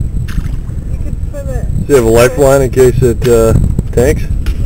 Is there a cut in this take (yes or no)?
no